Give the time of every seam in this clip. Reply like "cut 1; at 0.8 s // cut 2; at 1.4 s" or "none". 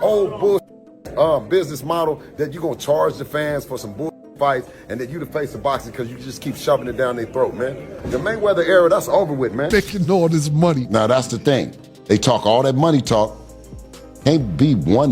cut 1; at 9.7 s